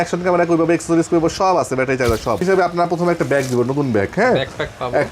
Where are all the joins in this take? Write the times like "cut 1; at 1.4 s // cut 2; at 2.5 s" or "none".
cut 1; at 2.4 s